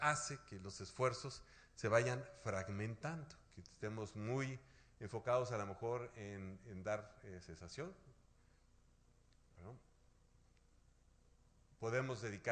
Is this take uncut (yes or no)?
yes